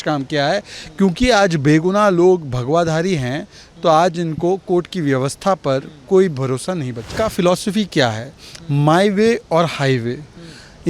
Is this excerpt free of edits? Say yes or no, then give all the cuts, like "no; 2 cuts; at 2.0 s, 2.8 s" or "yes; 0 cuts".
no; 1 cut; at 7.1 s